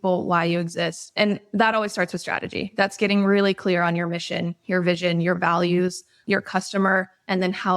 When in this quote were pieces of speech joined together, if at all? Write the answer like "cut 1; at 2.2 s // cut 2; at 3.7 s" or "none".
cut 1; at 1.0 s